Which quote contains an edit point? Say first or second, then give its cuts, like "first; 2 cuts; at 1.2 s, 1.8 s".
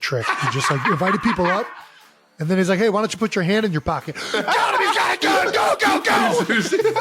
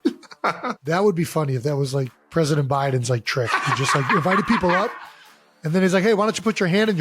second; 2 cuts; at 0.8 s, 2.2 s